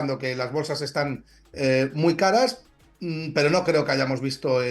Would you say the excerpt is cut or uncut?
uncut